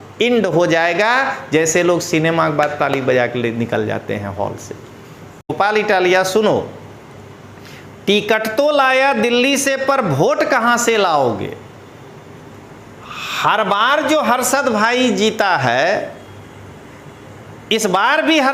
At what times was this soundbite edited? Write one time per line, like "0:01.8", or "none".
0:05.5